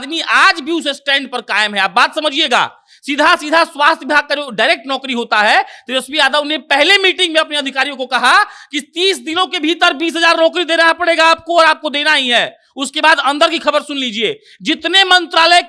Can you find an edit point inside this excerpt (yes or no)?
no